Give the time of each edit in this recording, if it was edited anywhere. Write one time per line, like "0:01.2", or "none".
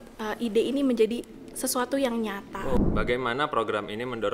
0:02.8